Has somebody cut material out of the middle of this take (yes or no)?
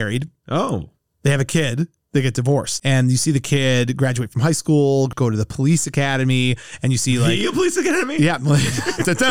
yes